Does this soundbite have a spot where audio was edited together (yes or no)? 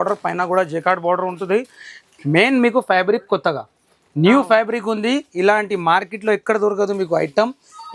no